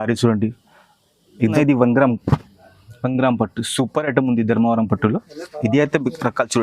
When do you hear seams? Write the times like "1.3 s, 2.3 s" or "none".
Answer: 1.4 s